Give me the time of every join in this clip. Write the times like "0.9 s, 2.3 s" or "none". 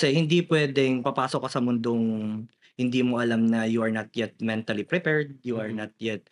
none